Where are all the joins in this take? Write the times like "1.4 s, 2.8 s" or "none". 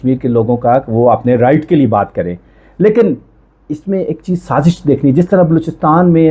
none